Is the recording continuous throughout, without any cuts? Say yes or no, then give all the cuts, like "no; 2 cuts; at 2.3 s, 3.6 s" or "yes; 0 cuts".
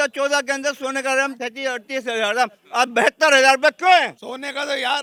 yes; 0 cuts